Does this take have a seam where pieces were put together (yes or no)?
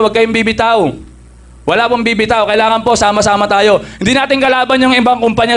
no